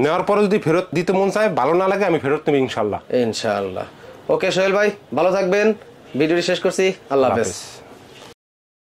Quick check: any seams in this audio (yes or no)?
no